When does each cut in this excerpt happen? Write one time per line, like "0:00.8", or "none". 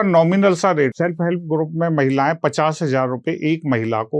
0:00.9